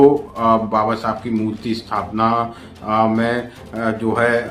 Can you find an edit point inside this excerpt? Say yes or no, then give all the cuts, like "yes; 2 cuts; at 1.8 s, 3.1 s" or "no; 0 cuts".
no; 0 cuts